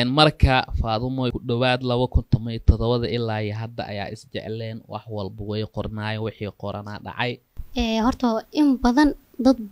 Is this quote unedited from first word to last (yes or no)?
no